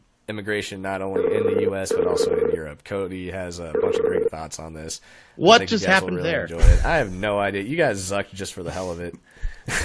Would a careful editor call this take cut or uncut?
uncut